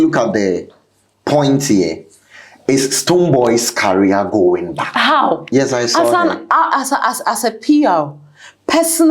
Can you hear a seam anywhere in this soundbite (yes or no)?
yes